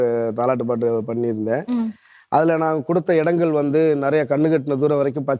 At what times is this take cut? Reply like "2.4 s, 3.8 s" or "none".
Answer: none